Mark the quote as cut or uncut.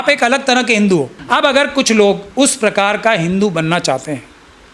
cut